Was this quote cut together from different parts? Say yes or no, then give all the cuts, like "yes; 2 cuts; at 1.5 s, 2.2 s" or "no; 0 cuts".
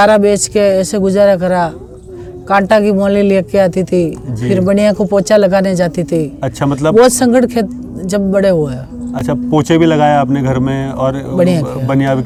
no; 0 cuts